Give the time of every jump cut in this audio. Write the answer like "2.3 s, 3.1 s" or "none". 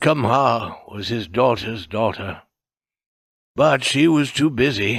none